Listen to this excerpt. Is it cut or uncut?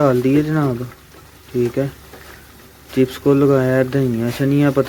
uncut